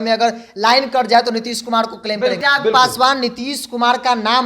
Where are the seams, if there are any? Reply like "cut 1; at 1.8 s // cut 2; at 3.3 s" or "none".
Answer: cut 1; at 2.4 s

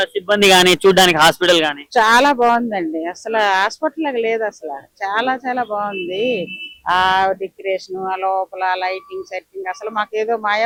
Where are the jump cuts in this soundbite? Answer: none

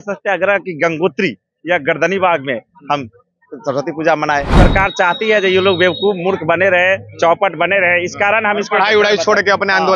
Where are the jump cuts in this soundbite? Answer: cut 1; at 4.6 s

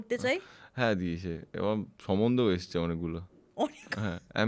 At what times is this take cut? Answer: none

